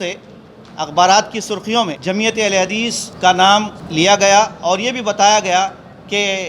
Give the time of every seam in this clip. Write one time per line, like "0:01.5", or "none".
0:02.0
0:03.1
0:03.8